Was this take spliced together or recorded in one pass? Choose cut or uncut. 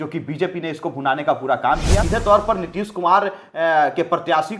cut